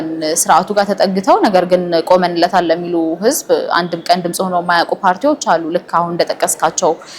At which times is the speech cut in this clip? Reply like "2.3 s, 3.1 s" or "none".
none